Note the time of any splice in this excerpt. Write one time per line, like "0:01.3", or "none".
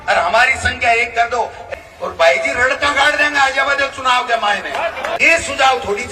0:01.7
0:05.2